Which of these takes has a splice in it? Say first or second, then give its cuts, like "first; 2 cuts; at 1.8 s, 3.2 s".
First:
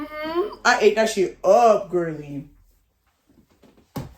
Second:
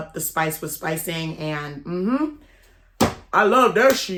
first; 1 cut; at 2.6 s